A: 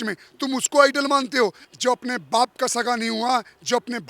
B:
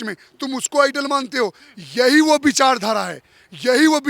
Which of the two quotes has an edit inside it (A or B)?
A